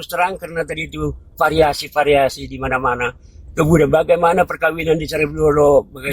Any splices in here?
no; 0 cuts

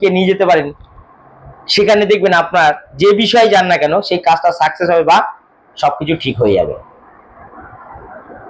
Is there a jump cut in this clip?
no; 0 cuts

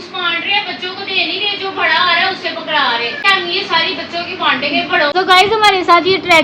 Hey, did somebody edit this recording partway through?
yes; 2 cuts; at 3.2 s, 5.1 s

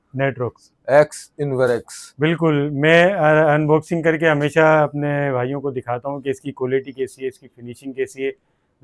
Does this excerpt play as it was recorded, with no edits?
yes; 0 cuts

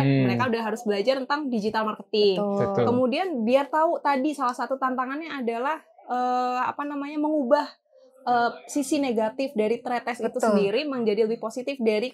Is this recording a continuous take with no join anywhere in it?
yes; 0 cuts

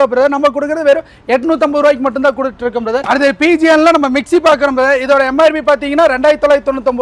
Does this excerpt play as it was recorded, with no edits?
yes; 0 cuts

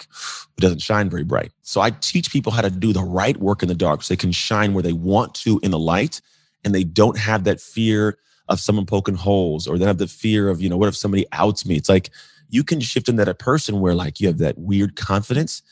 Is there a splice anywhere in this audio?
yes; 1 cut; at 1.6 s

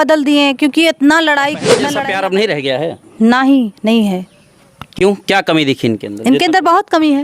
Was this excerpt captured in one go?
no; 1 cut; at 1.8 s

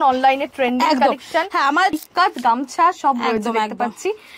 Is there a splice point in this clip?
yes; 1 cut; at 2.0 s

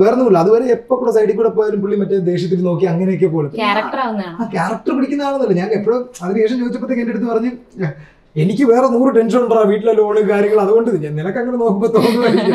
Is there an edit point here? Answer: no; 0 cuts

